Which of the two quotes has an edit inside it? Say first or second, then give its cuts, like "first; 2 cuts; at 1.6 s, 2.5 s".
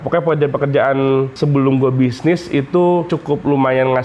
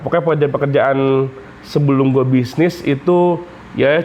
first; 2 cuts; at 1.3 s, 3.1 s